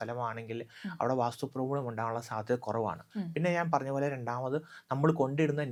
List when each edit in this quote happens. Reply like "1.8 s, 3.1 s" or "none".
none